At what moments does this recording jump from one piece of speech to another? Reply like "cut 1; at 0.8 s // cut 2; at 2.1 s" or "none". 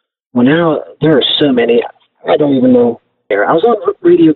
cut 1; at 3.3 s